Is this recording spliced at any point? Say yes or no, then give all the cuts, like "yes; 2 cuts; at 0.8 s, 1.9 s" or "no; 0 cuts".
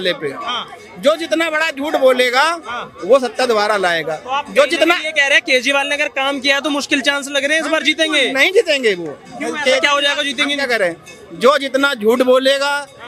no; 0 cuts